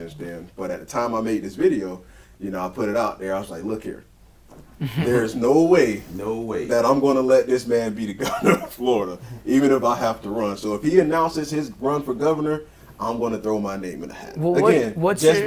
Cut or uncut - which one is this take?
uncut